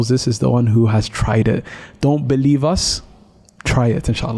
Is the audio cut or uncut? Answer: uncut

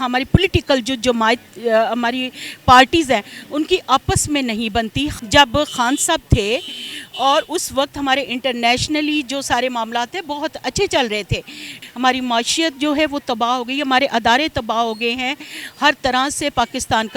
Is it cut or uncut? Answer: cut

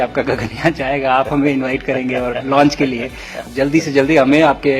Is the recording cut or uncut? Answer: cut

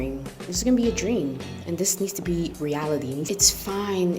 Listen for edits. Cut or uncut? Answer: cut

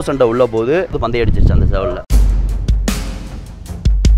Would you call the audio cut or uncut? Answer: cut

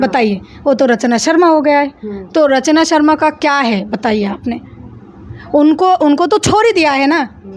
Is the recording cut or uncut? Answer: uncut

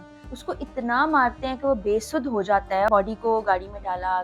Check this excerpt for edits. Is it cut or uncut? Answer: cut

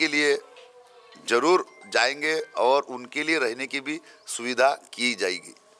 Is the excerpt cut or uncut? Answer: uncut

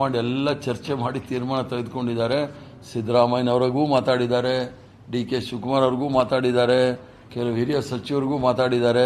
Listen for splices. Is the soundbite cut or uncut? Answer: uncut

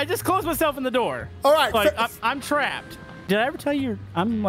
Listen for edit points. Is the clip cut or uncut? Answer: cut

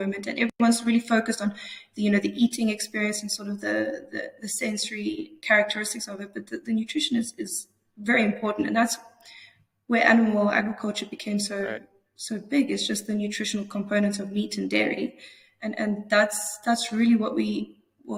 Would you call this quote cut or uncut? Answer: uncut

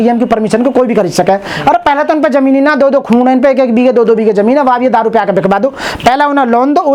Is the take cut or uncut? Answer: uncut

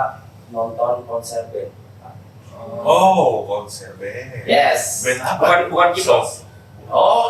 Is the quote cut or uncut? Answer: uncut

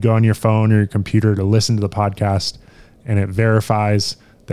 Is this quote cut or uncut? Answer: uncut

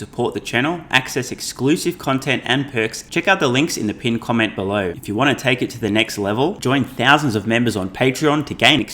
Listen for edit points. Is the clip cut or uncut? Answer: cut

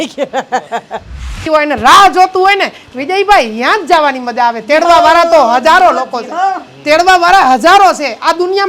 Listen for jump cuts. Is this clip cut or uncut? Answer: cut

